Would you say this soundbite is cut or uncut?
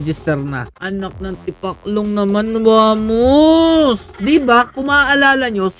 cut